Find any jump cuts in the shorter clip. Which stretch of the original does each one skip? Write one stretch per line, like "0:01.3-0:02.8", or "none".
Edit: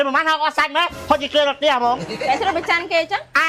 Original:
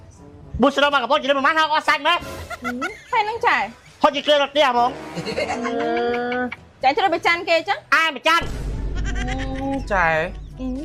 0:02.3-0:03.9
0:05.0-0:06.7